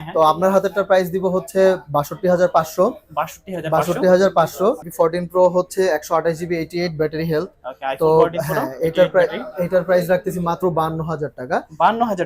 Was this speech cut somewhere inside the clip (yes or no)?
yes